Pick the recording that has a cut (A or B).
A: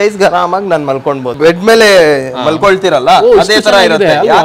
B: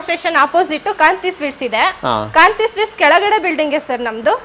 A